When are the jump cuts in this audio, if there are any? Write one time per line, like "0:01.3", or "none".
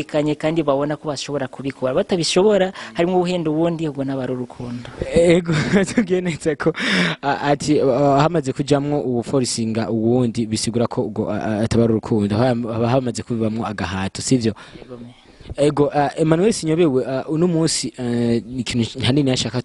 none